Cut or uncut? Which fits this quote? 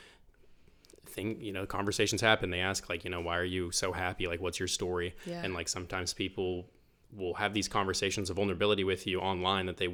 uncut